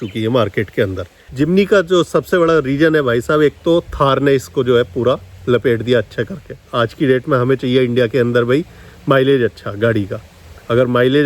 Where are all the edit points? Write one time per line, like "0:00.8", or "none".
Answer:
0:01.2
0:06.6

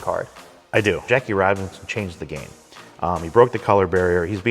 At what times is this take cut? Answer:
0:01.0

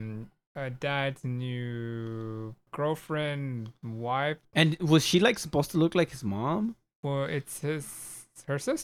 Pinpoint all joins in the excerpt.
0:02.7
0:04.5

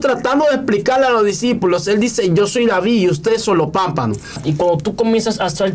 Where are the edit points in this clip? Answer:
0:04.4

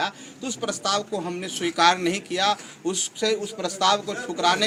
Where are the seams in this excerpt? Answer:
none

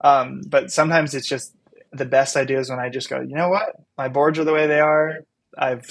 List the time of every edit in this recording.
0:01.8

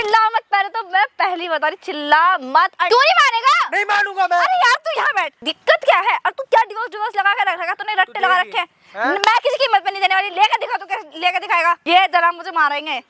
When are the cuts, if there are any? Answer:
0:02.9
0:05.4
0:11.8

